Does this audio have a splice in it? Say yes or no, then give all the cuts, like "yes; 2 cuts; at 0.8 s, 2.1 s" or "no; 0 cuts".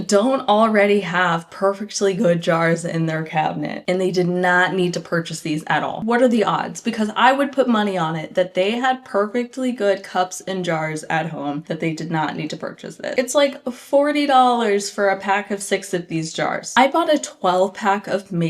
no; 0 cuts